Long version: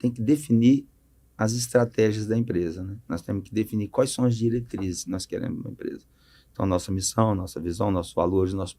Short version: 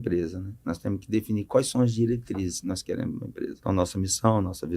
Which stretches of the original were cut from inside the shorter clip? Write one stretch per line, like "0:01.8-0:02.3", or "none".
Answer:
0:06.0-0:06.5

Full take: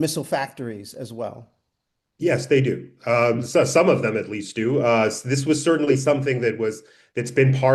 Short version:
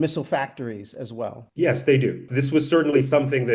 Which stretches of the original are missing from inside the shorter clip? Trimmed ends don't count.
0:01.4-0:02.1
0:02.9-0:05.2

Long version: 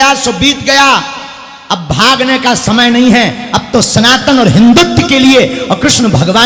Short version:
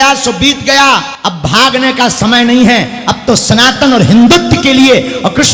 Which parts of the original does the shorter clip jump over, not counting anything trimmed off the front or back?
0:01.2-0:01.6

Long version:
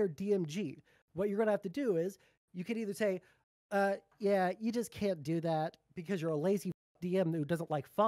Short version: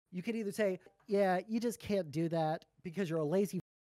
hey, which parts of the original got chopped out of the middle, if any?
0:03.4-0:04.1

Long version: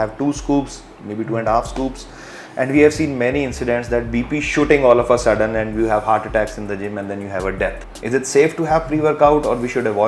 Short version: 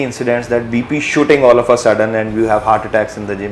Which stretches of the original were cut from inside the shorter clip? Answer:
none

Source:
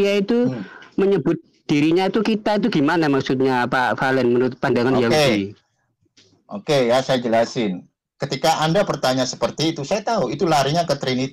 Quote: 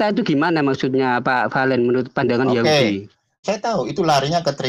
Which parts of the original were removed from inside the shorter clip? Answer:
0:05.8-0:09.8

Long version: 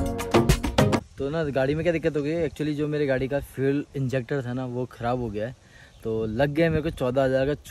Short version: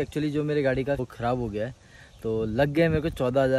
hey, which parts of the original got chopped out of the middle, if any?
0:03.5-0:04.9

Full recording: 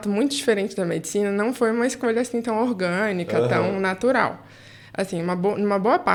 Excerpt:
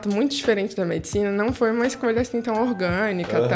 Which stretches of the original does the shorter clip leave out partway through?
none

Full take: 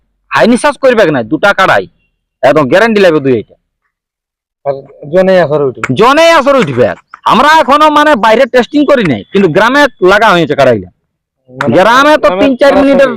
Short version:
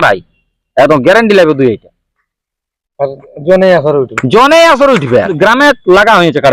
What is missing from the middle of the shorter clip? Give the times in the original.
0:07.0-0:09.5

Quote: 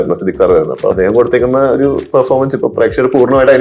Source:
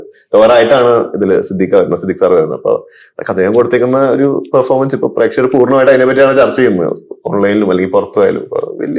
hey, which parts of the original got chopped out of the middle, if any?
0:02.8-0:03.3

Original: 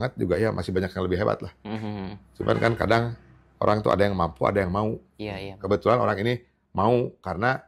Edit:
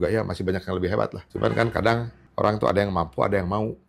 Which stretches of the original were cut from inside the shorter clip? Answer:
0:01.5-0:02.3
0:03.2-0:03.4

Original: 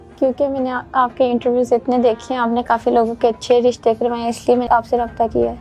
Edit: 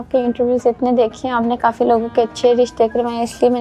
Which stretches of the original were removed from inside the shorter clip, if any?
none

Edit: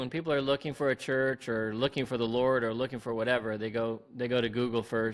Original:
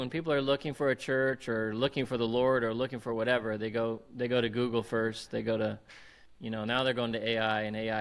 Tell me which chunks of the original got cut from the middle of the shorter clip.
none

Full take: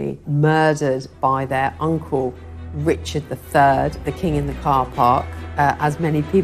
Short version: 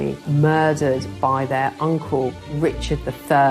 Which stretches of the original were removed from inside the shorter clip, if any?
0:02.4-0:02.7

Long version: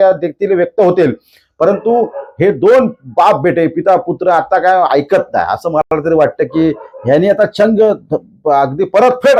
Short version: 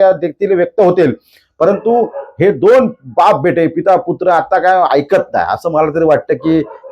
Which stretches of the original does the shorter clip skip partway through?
0:05.8-0:05.9

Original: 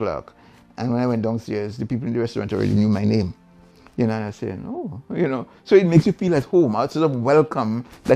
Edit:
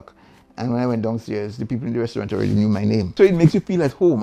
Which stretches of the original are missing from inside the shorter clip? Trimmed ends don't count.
0:03.3-0:05.6

